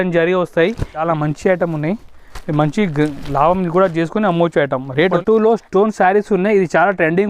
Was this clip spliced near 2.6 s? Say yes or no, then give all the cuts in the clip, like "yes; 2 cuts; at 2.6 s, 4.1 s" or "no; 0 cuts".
no; 2 cuts; at 1.0 s, 5.0 s